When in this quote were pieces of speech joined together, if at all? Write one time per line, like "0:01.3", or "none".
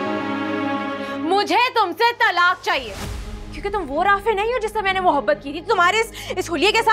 0:01.1